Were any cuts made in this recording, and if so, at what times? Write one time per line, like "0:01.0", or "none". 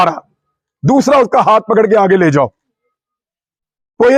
none